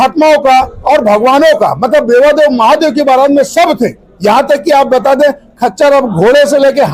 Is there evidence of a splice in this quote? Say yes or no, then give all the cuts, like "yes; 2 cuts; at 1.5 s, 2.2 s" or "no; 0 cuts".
no; 0 cuts